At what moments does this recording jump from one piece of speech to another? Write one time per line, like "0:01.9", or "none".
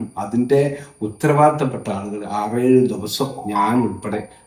none